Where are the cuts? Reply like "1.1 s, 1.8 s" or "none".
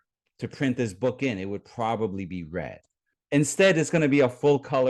3.1 s

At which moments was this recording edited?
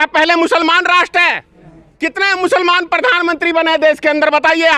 none

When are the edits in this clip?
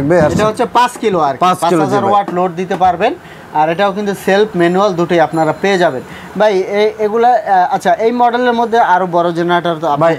none

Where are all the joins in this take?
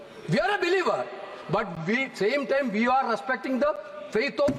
none

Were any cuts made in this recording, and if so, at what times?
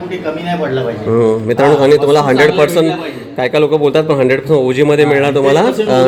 none

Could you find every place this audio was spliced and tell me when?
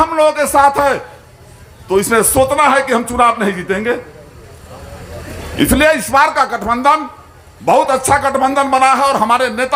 none

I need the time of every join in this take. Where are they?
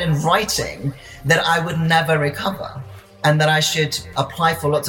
3.2 s

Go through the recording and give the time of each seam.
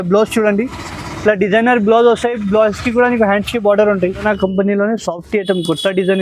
4.2 s

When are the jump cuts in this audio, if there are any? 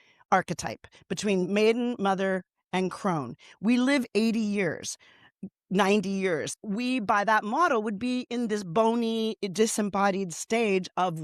1.4 s, 6.5 s

